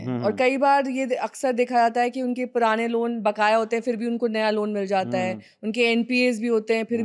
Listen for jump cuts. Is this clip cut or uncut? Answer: uncut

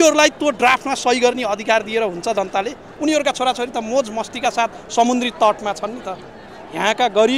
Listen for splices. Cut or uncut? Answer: cut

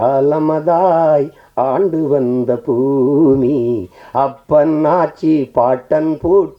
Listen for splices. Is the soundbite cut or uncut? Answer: uncut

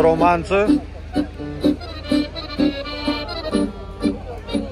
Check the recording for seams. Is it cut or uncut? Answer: uncut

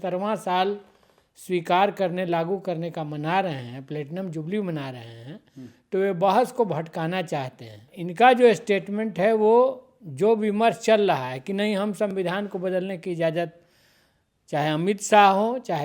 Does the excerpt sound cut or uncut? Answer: cut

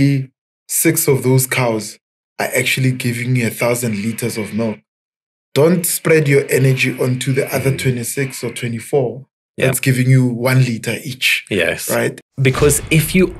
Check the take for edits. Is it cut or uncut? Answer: cut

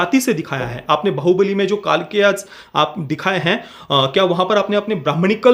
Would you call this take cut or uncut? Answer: uncut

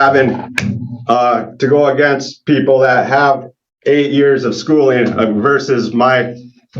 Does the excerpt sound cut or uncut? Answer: uncut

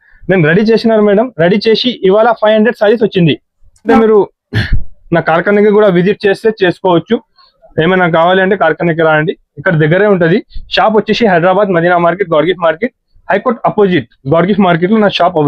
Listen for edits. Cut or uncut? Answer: cut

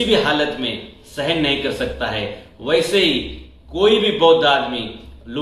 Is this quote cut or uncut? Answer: uncut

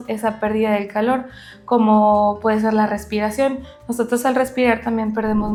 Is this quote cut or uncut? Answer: uncut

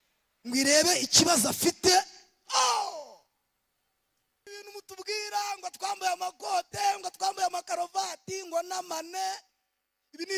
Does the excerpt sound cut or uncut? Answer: cut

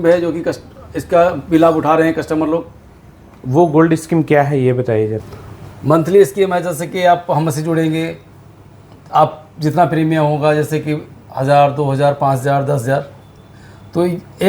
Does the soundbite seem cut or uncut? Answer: cut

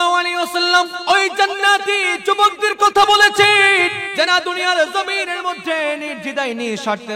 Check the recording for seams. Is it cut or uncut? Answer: cut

